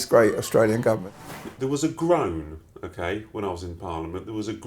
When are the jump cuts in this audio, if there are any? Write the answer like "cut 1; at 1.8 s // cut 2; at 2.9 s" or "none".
cut 1; at 1.2 s